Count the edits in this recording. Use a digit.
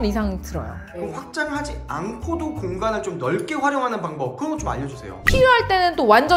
2